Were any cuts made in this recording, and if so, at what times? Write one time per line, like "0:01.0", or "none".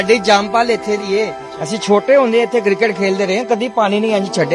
none